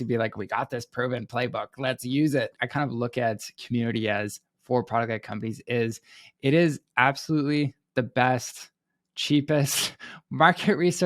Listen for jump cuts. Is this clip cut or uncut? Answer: cut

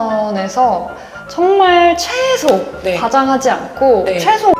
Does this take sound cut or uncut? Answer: uncut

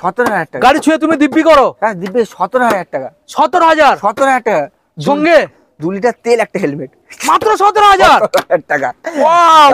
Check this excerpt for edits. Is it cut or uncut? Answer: uncut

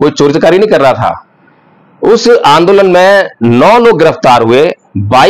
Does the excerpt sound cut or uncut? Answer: uncut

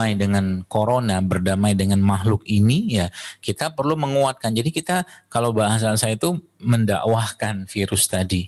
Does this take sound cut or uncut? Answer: uncut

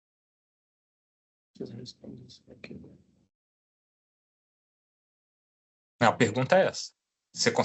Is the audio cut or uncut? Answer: uncut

